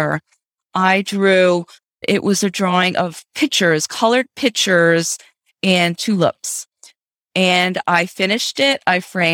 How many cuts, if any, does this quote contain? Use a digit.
1